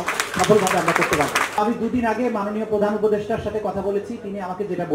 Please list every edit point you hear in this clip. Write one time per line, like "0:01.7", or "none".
0:01.6